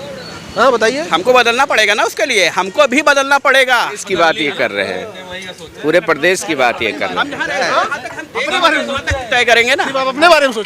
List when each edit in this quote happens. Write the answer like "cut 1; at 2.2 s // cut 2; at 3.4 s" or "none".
cut 1; at 4.0 s